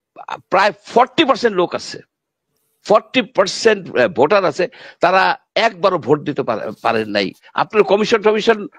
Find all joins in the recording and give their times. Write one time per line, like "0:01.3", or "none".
0:07.3